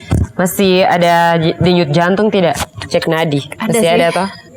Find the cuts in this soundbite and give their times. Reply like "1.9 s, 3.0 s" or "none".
3.5 s